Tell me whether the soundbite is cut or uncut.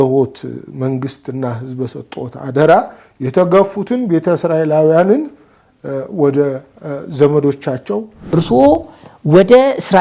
cut